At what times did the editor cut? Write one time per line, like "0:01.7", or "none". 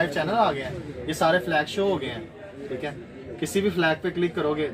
none